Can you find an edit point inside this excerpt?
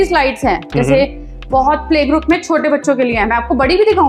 no; 0 cuts

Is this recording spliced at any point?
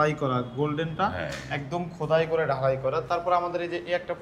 no; 0 cuts

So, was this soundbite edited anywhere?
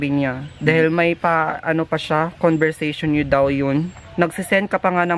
yes; 2 cuts; at 1.6 s, 4.0 s

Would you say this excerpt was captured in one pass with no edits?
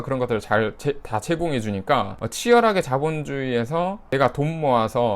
no; 2 cuts; at 2.2 s, 4.1 s

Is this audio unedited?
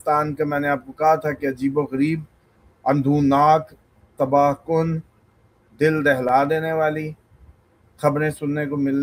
yes; 0 cuts

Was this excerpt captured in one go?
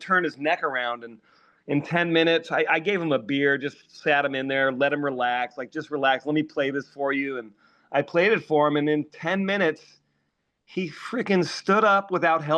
yes; 0 cuts

